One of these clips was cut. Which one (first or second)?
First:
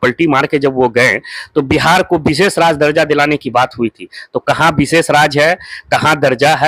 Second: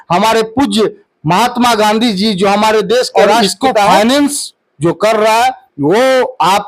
second